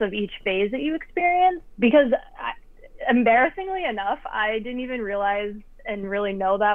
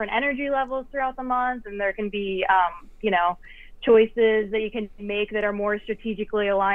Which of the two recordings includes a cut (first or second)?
first